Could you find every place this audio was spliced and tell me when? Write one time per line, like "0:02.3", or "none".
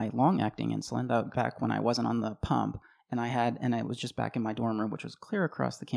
none